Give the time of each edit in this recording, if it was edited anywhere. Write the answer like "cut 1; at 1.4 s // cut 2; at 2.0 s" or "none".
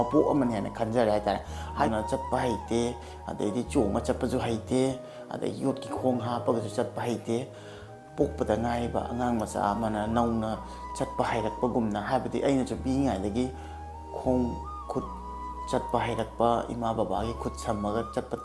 cut 1; at 1.8 s